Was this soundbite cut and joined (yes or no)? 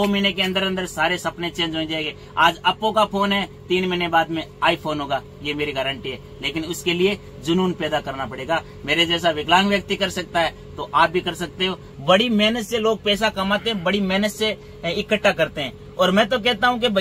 yes